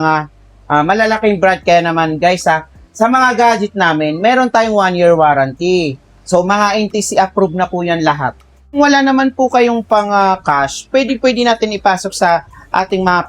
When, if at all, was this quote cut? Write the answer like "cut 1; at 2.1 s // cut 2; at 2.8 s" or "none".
cut 1; at 8.8 s